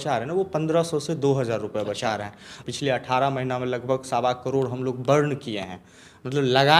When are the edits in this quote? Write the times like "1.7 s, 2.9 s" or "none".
2.5 s